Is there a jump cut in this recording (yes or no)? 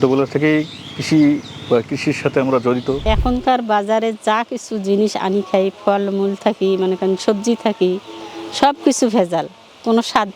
yes